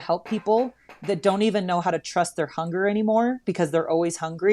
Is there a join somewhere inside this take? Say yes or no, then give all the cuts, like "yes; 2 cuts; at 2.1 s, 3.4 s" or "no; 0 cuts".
no; 0 cuts